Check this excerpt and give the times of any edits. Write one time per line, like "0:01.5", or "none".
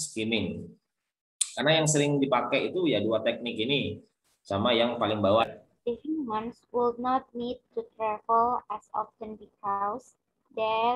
0:05.4